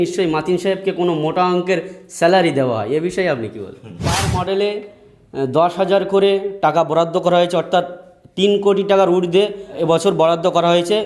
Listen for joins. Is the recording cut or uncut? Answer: cut